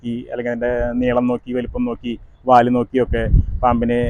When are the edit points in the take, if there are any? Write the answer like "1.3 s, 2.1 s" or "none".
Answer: none